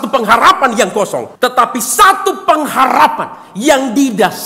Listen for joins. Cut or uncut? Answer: cut